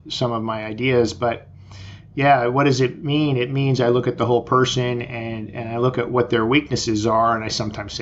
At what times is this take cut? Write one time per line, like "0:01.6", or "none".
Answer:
none